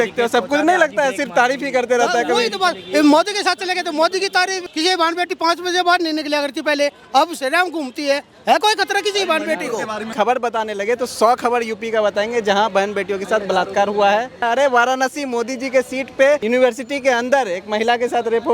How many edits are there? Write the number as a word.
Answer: three